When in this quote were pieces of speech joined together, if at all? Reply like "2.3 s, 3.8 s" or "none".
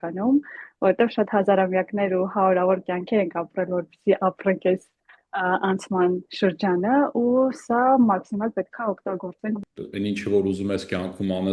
9.6 s